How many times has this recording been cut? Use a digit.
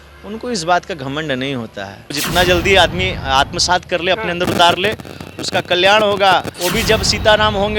2